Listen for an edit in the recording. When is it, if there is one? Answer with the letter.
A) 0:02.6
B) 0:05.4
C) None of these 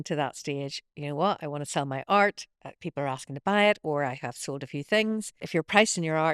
B